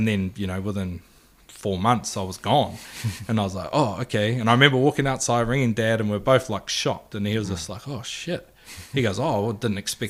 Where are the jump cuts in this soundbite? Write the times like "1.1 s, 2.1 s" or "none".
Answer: none